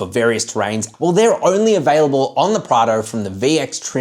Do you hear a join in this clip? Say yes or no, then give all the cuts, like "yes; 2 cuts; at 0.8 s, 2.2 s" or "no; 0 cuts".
yes; 1 cut; at 0.9 s